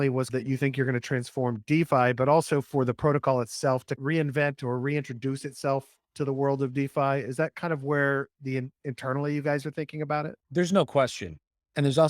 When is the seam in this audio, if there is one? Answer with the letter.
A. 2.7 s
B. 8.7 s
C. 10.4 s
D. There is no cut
C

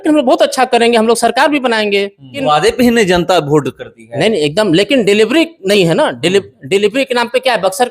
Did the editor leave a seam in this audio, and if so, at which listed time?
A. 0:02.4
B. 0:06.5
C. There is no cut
A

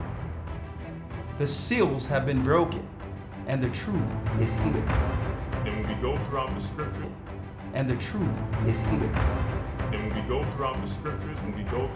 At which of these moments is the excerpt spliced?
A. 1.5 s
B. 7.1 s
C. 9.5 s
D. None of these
B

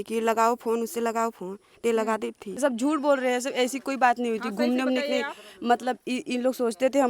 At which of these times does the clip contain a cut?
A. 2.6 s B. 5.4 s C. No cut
A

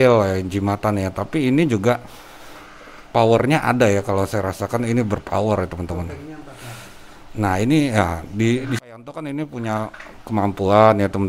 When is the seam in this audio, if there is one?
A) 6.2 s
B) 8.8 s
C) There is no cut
B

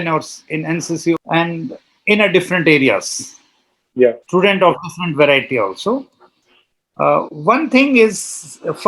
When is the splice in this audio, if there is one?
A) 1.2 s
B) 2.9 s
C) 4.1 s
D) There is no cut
A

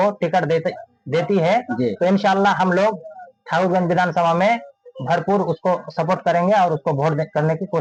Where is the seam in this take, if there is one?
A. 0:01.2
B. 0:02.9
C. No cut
C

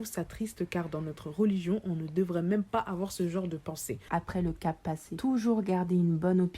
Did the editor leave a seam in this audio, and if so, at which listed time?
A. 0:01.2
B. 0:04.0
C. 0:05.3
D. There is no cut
B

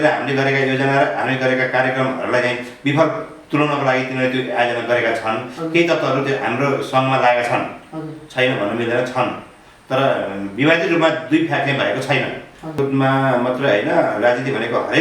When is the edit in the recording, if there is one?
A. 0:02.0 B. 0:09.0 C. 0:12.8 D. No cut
C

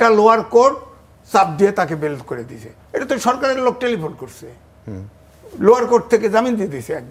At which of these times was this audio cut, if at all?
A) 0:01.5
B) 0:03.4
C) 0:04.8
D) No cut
D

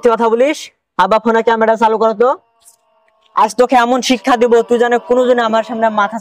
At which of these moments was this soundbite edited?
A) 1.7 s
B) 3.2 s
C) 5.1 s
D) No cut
D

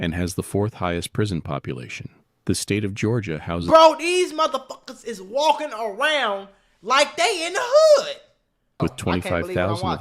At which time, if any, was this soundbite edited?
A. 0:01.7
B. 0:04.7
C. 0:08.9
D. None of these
C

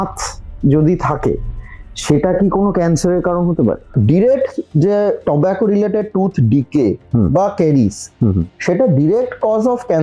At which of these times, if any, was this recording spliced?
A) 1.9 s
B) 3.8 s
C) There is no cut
B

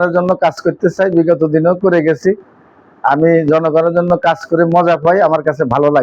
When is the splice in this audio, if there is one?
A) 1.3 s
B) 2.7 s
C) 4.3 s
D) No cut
D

